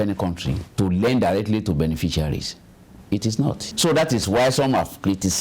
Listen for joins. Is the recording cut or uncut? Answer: cut